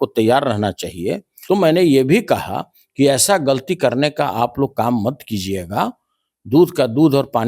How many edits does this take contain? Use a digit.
1